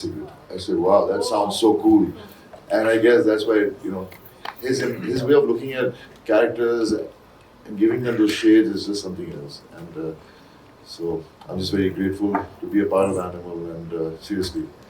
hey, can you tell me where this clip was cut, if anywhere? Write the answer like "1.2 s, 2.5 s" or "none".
none